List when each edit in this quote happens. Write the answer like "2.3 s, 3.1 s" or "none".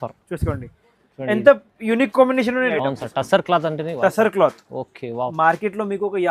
2.7 s